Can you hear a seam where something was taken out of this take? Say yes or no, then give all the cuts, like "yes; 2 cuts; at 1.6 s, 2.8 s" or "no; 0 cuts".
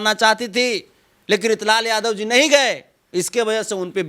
no; 0 cuts